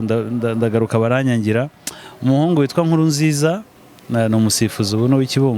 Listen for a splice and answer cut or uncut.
uncut